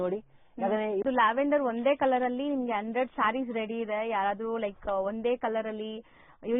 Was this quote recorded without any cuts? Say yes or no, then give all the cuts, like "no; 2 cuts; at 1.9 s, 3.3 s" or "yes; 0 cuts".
no; 1 cut; at 1.0 s